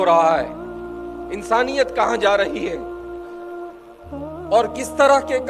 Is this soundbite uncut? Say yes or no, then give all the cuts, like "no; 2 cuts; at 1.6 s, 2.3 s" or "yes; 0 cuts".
yes; 0 cuts